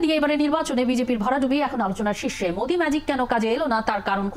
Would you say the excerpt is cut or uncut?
uncut